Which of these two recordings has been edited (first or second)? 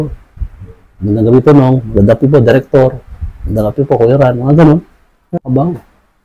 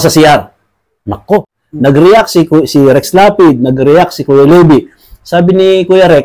second